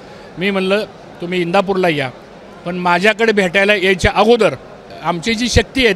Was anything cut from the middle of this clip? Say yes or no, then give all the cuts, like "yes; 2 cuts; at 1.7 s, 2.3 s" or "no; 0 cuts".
yes; 1 cut; at 4.9 s